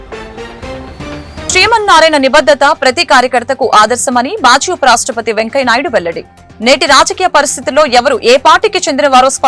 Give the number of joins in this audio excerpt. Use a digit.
1